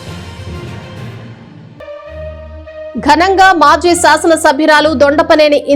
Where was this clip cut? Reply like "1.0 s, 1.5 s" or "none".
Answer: 2.0 s